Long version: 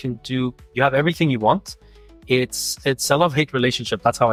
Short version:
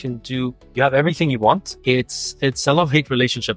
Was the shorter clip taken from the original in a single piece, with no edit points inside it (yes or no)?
no